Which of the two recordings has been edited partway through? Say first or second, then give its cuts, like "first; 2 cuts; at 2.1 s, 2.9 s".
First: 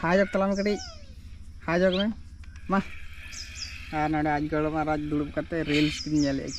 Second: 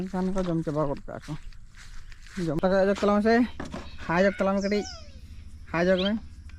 second; 1 cut; at 2.6 s